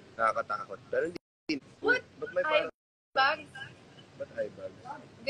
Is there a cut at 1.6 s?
yes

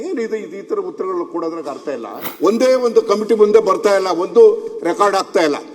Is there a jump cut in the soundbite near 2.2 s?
yes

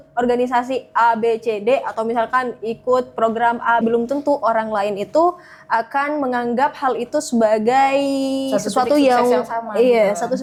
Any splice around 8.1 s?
no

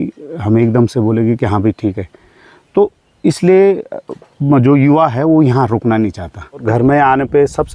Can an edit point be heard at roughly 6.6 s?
yes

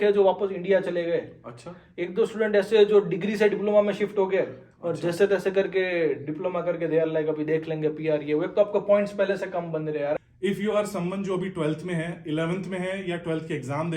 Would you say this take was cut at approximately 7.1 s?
no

